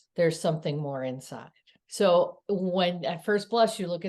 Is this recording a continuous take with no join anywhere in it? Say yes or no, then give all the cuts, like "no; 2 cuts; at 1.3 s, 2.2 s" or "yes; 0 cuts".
no; 1 cut; at 1.8 s